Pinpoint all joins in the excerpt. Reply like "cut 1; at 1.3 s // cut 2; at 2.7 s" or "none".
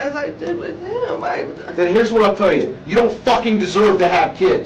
none